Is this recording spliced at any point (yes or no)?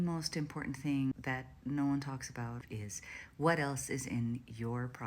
yes